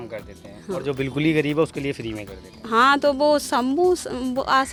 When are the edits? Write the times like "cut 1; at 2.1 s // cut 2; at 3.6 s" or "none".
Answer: none